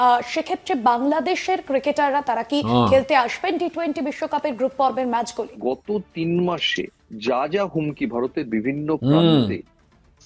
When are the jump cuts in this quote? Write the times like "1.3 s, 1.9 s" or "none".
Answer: 5.4 s